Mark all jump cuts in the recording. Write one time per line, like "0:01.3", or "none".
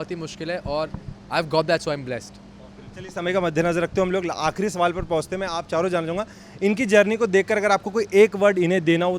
none